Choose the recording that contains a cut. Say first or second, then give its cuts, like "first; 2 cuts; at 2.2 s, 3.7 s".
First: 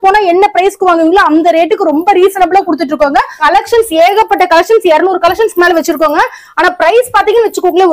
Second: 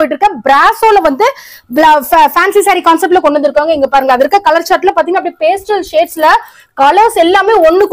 first; 1 cut; at 3.3 s